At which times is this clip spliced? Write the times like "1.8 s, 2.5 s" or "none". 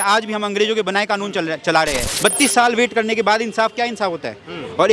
2.1 s